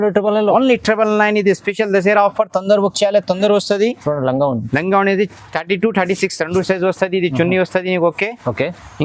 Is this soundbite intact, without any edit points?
yes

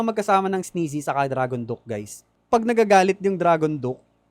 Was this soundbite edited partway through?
yes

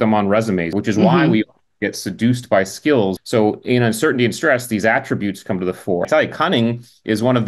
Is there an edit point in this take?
yes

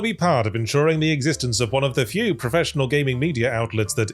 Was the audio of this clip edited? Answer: no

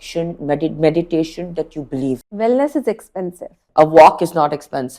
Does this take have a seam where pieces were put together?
yes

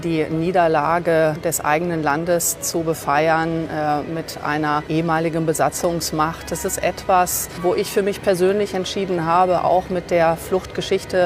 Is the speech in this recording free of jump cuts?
no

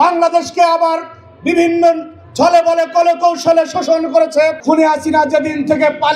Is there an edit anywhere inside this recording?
yes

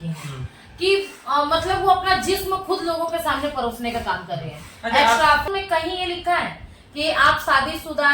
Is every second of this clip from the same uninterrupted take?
no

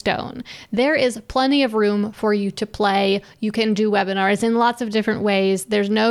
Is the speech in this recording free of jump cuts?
yes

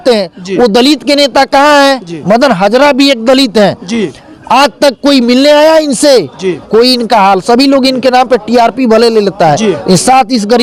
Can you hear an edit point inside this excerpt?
no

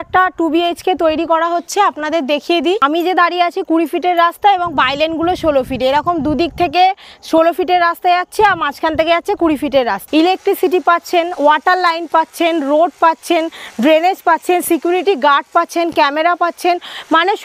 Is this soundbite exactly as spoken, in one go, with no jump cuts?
no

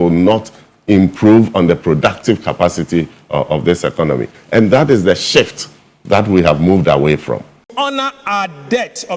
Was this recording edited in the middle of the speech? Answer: yes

